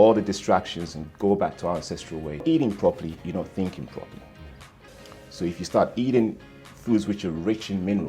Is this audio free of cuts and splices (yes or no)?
no